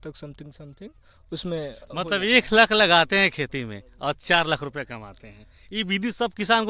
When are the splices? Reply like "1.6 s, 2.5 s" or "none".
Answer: none